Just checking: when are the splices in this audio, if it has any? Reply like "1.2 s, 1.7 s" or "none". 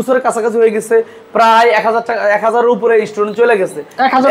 none